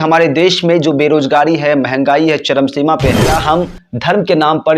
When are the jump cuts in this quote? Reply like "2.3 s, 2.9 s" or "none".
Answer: 3.4 s

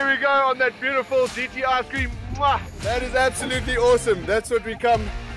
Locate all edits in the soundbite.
2.9 s

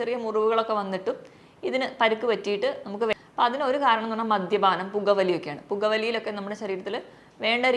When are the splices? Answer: 3.1 s

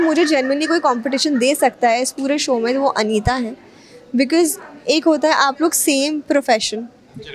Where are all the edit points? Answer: none

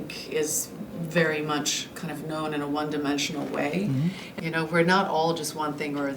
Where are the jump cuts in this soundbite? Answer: 4.3 s

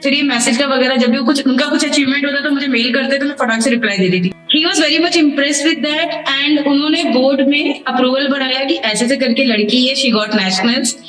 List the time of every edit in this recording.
4.3 s

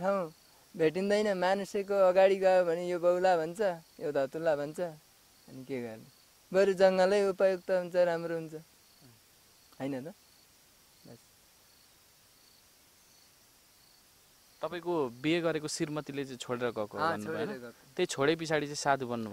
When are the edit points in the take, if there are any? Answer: none

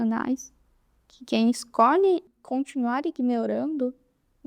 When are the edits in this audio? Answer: 2.3 s

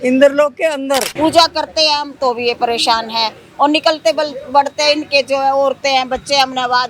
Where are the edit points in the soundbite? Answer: 1.1 s

